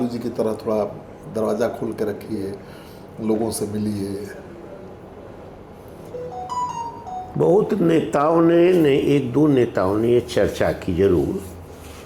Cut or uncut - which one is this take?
uncut